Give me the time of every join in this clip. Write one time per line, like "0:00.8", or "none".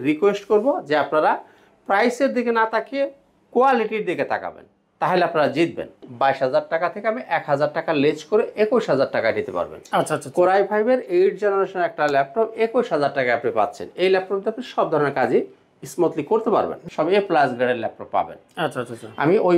0:06.1
0:16.8